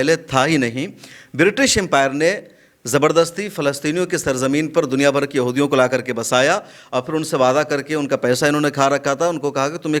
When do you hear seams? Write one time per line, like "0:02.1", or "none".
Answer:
none